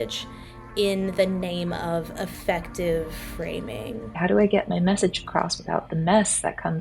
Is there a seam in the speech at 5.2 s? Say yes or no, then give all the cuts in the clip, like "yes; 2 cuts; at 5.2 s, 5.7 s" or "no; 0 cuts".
no; 1 cut; at 4.0 s